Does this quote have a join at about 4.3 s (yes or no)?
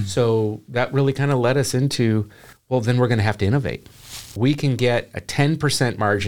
yes